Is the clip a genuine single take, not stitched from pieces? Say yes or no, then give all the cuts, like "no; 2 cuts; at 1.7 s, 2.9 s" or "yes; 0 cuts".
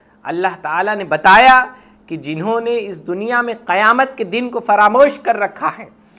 yes; 0 cuts